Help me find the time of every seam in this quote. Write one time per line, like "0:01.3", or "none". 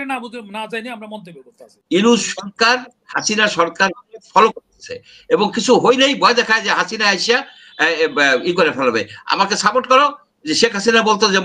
0:01.7